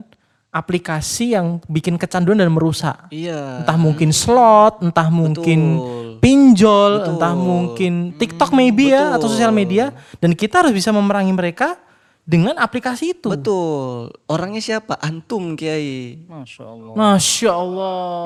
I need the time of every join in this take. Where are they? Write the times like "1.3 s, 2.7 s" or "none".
none